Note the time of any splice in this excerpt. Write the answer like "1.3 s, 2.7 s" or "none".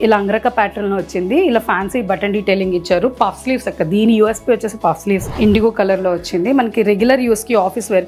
5.3 s